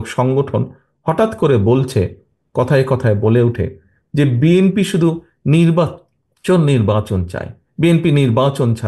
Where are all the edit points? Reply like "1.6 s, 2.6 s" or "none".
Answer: none